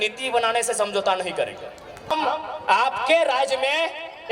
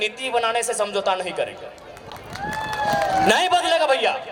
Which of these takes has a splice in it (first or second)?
first